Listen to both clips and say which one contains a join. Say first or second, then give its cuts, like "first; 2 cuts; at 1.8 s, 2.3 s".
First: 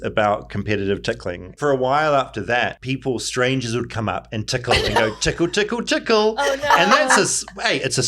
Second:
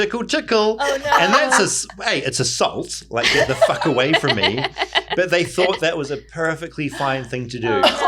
first; 2 cuts; at 1.5 s, 2.8 s